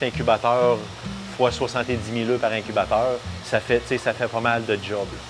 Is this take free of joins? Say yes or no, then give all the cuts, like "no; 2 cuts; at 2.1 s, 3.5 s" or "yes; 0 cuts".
yes; 0 cuts